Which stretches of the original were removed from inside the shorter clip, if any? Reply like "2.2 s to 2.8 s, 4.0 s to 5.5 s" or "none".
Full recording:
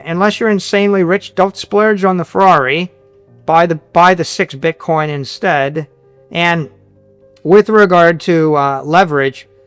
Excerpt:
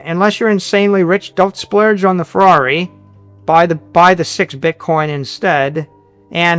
none

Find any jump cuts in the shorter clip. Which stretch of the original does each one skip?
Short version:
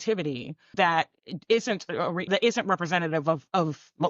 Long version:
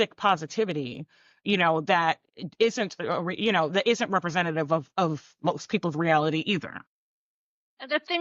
1.2 s to 1.8 s, 3.4 s to 3.7 s

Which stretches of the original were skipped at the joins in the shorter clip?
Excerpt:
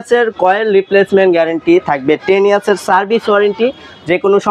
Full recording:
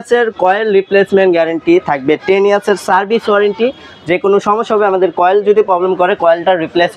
none

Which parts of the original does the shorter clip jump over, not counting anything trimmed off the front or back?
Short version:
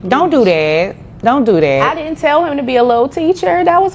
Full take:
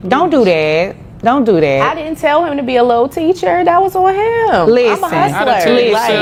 none

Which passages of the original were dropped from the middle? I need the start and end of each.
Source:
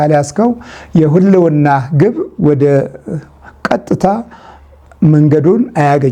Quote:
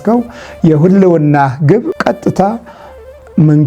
2.2 s to 3.6 s

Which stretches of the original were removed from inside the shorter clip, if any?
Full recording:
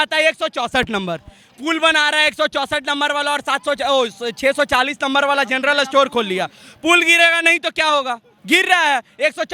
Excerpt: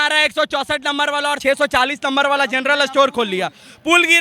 3.4 s to 4.4 s

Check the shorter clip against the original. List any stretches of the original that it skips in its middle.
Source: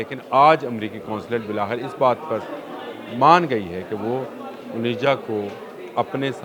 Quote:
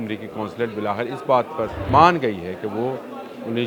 2.5 s to 3.1 s

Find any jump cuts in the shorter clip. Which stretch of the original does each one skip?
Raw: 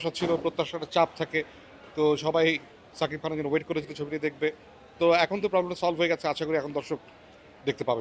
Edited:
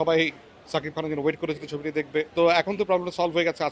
4.6 s to 4.9 s

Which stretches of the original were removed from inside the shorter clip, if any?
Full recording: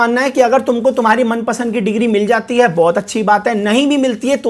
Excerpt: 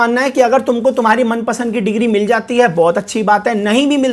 none

